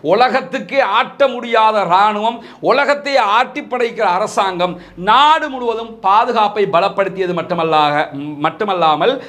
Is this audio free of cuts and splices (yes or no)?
yes